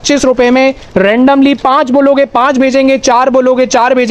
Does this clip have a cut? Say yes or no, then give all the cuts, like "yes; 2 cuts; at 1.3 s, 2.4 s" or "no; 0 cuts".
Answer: no; 0 cuts